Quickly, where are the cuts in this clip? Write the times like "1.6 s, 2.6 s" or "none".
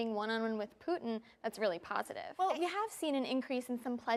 none